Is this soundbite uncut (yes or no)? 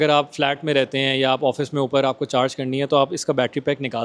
yes